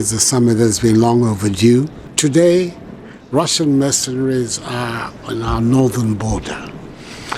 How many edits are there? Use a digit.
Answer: 1